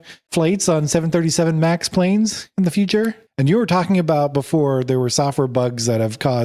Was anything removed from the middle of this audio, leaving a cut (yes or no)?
yes